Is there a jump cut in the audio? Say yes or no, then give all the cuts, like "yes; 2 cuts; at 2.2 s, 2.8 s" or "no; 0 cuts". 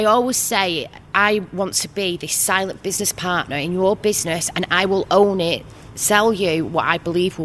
yes; 1 cut; at 1.0 s